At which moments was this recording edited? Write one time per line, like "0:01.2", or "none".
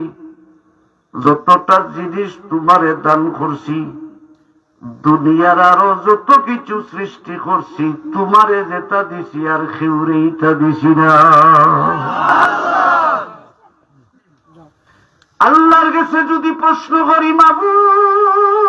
0:01.2
0:12.5
0:15.0